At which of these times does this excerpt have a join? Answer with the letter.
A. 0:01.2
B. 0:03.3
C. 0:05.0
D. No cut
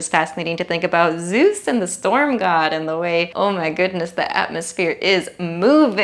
B